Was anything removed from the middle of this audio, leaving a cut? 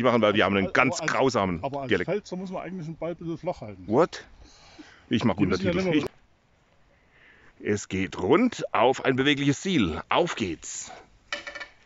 yes; 1 cut; at 6.1 s

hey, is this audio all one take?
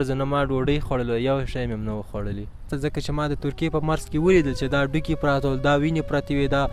no; 1 cut; at 2.7 s

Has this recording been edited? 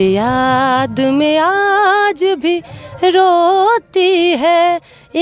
no; 0 cuts

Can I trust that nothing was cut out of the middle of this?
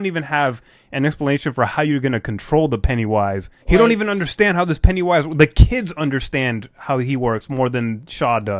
no; 1 cut; at 3.5 s

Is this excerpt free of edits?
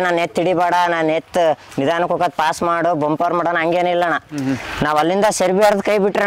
yes; 0 cuts

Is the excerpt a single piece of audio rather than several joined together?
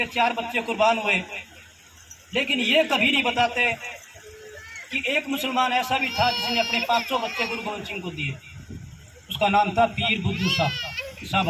yes; 0 cuts

